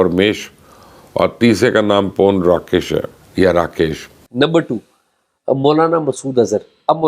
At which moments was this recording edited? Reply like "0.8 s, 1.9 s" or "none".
4.1 s